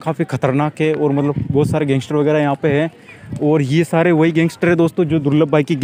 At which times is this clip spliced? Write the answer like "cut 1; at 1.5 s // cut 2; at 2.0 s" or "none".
none